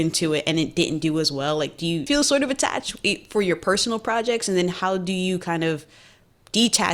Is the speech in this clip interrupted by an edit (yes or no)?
yes